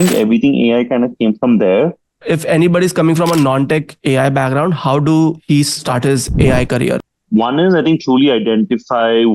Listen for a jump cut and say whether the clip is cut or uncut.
cut